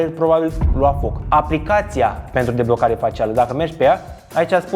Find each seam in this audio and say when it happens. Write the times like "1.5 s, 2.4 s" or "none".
1.2 s